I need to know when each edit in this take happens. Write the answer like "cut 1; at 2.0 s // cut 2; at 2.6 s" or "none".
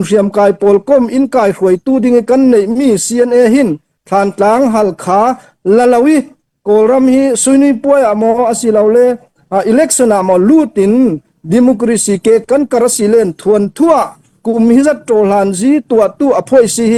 none